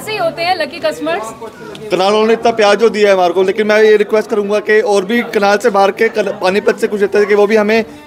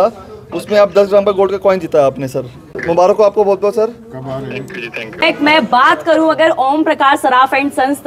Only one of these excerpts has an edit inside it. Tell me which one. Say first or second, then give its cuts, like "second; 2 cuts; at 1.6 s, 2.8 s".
second; 2 cuts; at 2.8 s, 5.2 s